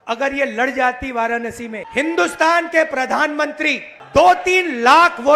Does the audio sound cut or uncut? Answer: cut